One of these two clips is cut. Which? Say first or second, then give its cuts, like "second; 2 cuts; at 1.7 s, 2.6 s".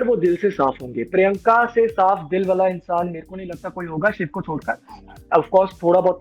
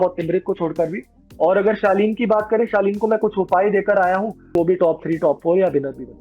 second; 2 cuts; at 1.2 s, 4.5 s